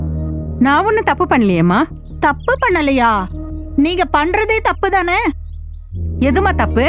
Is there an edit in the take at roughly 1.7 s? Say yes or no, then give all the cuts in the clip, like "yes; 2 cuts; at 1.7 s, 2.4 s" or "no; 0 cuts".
no; 0 cuts